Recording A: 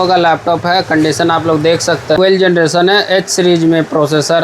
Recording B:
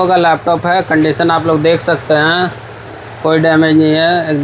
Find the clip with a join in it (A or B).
A